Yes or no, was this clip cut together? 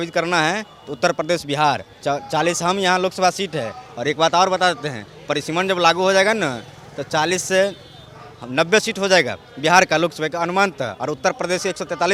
no